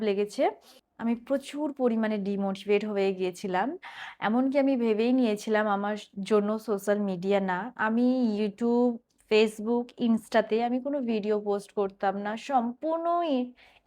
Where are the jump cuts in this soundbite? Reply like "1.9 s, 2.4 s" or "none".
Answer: 0.9 s